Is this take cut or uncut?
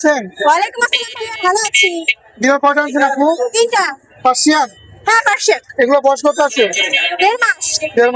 uncut